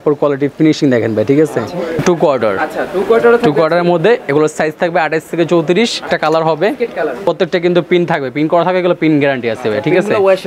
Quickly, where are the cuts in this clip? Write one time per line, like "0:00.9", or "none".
0:02.0
0:06.0
0:07.2